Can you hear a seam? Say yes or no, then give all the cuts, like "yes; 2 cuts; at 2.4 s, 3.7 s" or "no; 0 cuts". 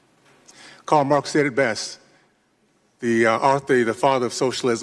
no; 0 cuts